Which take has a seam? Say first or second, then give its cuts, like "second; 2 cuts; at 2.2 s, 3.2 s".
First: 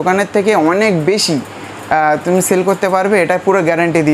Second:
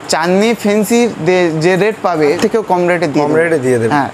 second; 1 cut; at 2.4 s